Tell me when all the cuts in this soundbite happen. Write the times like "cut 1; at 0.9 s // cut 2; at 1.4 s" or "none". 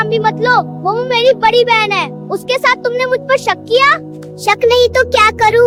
none